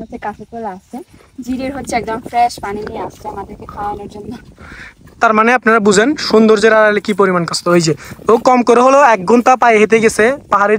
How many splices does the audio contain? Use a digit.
0